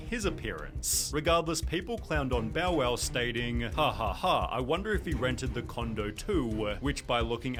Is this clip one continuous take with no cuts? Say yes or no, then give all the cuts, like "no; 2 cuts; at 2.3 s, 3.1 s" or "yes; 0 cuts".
yes; 0 cuts